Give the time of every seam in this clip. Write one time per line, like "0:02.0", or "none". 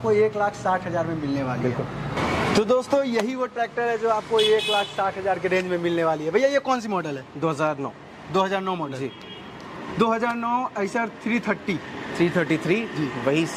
none